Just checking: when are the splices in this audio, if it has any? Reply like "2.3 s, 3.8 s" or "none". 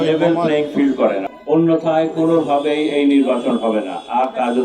1.3 s